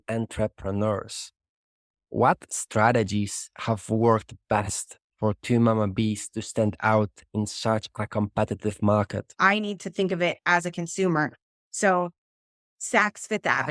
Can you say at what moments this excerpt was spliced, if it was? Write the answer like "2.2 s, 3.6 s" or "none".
9.3 s